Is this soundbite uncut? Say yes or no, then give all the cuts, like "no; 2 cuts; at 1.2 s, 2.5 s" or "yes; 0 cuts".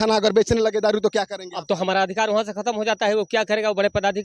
yes; 0 cuts